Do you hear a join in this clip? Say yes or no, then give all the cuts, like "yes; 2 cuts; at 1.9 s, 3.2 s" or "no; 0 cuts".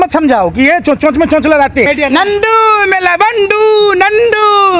yes; 1 cut; at 1.9 s